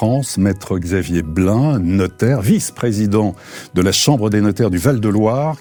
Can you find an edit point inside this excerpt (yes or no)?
no